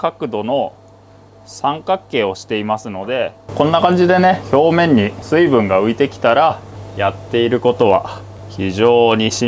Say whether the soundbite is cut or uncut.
cut